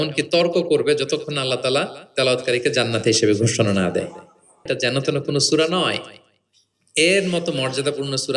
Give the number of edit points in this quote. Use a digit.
1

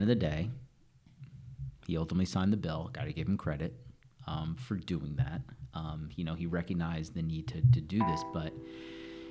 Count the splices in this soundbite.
0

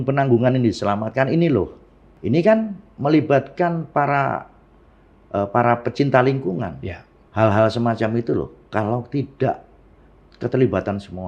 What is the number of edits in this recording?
2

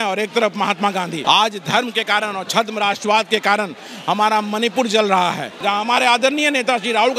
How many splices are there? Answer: 2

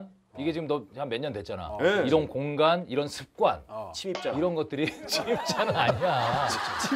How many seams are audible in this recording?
0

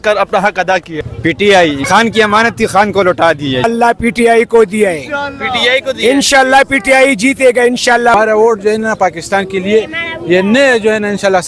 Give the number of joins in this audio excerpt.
3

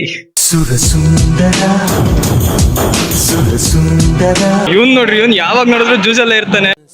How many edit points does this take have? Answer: 1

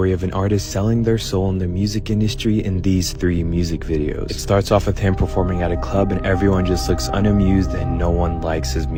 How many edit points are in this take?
0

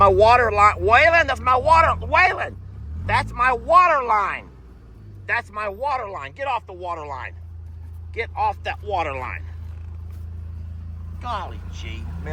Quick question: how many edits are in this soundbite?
0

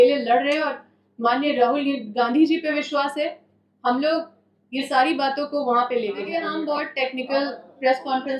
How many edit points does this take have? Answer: 1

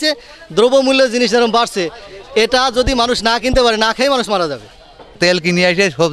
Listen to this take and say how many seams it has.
0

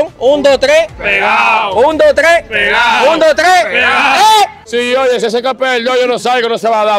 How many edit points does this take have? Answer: 1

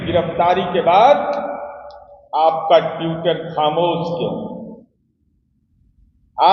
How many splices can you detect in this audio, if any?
0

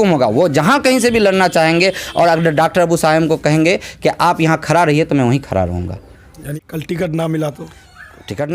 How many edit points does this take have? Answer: 1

